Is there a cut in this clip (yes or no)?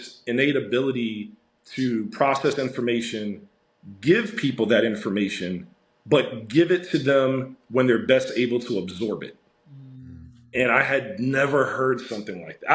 no